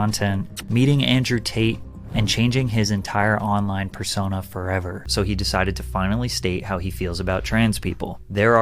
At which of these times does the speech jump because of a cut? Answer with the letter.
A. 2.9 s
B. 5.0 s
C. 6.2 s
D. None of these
B